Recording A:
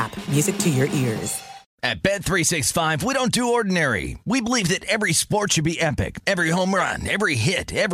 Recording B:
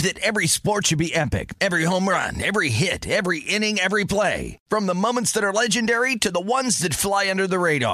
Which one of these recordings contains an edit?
A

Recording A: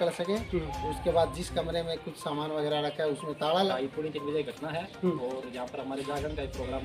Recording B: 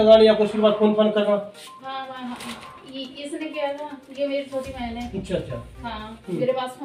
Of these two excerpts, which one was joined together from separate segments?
A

